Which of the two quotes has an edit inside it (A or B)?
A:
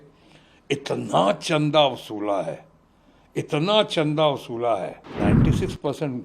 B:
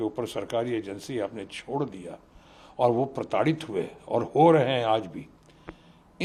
A